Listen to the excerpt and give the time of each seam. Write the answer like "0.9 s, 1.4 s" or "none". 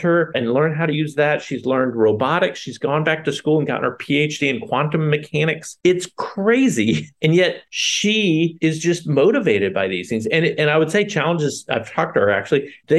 none

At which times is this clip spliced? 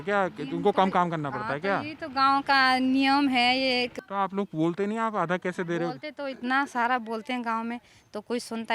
3.9 s

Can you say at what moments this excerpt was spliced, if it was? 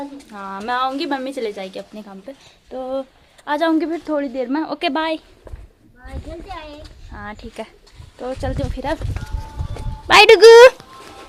none

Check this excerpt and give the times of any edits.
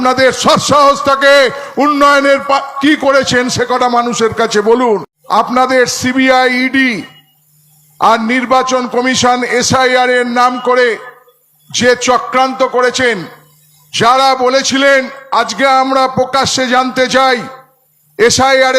5.1 s

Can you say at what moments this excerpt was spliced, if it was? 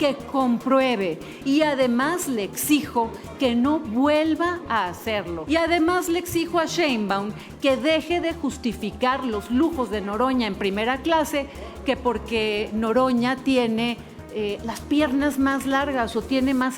5.3 s

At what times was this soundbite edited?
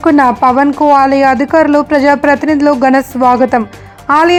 none

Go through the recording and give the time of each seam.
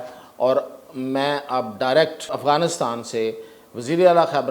2.3 s

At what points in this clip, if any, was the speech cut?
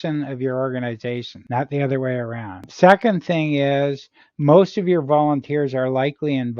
1.3 s, 2.7 s

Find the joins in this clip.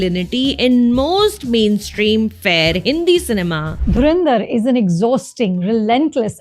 3.7 s

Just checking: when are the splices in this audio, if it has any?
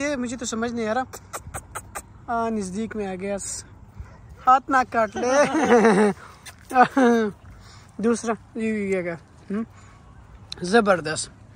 none

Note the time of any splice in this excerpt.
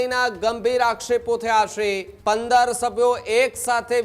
2.1 s

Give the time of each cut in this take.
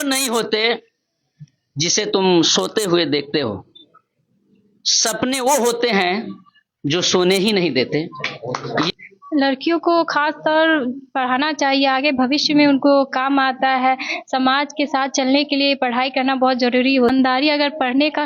8.9 s, 17.1 s

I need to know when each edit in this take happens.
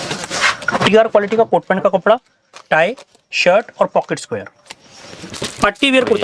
5.3 s

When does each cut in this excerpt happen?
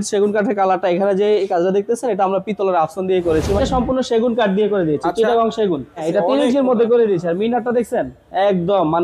3.6 s, 6.1 s

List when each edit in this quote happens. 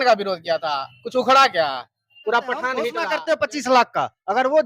3.0 s

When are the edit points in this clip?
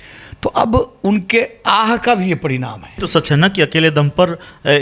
3.0 s

